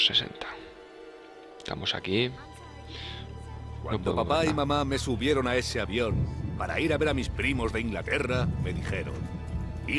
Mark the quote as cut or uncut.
uncut